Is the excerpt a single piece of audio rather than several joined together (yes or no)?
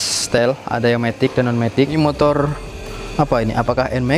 no